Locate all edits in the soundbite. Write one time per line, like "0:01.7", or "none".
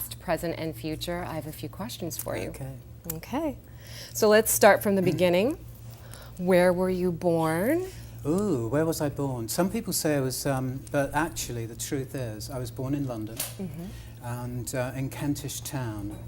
0:09.7